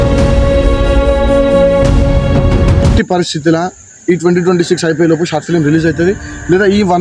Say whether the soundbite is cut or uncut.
cut